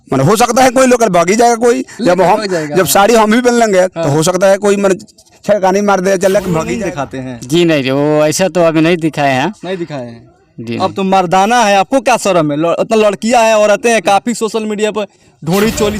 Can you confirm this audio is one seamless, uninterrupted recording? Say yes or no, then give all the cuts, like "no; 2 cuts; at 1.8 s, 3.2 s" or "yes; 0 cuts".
no; 1 cut; at 6.7 s